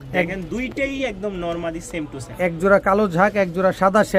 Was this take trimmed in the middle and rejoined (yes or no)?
no